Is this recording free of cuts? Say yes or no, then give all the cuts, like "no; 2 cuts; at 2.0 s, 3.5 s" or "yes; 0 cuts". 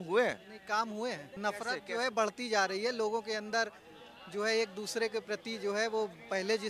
no; 1 cut; at 1.3 s